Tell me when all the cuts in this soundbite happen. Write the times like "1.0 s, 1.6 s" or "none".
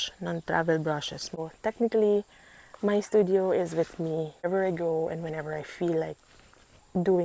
1.4 s, 4.5 s